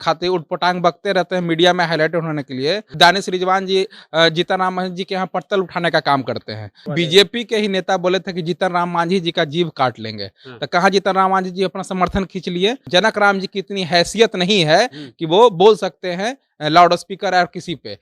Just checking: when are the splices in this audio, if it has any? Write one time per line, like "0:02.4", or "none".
0:02.9
0:06.9
0:12.8